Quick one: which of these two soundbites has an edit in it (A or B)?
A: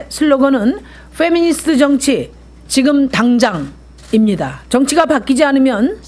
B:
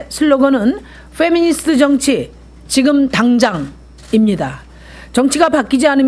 A